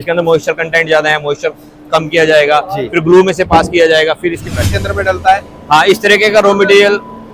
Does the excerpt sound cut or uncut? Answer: cut